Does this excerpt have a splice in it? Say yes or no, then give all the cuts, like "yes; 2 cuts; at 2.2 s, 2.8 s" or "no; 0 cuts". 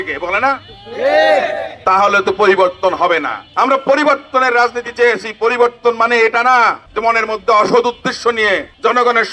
no; 0 cuts